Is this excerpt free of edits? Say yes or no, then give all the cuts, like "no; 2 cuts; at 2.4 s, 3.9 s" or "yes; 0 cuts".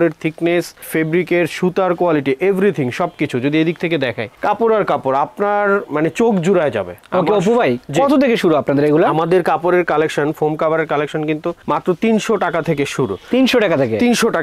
yes; 0 cuts